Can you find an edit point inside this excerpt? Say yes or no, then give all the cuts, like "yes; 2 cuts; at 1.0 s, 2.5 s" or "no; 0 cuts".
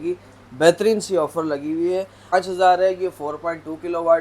yes; 1 cut; at 2.3 s